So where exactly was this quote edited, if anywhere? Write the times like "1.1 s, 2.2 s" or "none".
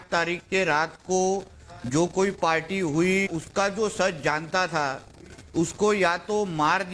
3.3 s